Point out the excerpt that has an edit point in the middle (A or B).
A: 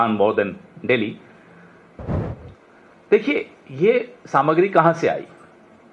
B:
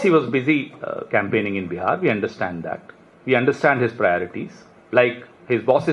A